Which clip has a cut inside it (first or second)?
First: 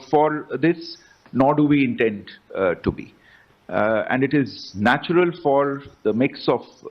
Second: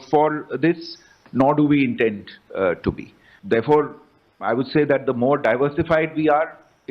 second